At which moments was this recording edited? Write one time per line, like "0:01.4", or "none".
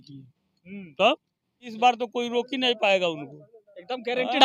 0:01.7

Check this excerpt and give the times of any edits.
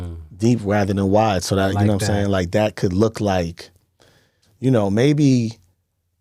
none

